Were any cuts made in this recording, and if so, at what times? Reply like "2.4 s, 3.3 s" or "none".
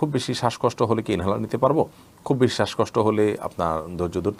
none